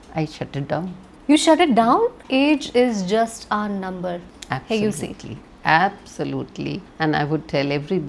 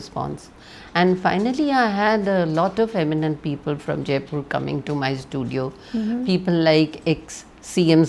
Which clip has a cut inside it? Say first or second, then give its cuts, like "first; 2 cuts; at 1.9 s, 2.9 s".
first; 4 cuts; at 1.1 s, 2.2 s, 4.3 s, 6.8 s